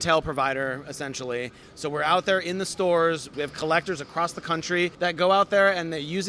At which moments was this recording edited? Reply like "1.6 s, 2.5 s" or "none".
1.6 s, 3.3 s, 4.9 s